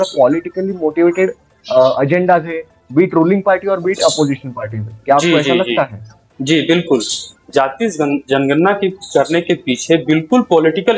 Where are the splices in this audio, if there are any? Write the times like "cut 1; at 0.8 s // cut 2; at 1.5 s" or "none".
none